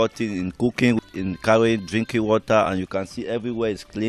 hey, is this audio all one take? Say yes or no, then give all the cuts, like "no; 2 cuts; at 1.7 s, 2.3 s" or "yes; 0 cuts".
no; 1 cut; at 1.0 s